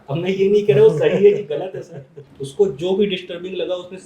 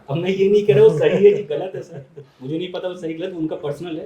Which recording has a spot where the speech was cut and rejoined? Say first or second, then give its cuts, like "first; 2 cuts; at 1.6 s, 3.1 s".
first; 1 cut; at 2.3 s